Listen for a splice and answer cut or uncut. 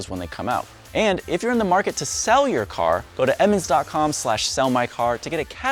uncut